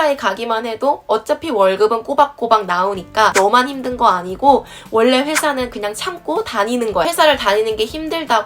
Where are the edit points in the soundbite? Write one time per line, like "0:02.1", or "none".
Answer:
0:03.3
0:07.0